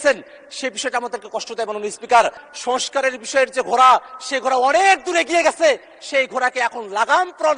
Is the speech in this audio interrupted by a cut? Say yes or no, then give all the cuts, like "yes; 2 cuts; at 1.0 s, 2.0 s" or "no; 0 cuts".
yes; 1 cut; at 2.4 s